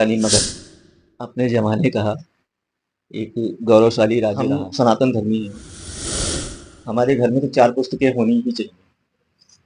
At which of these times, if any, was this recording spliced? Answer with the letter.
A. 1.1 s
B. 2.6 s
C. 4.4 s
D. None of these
C